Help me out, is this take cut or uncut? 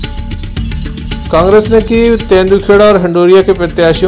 cut